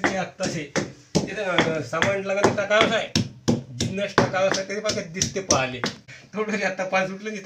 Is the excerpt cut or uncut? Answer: cut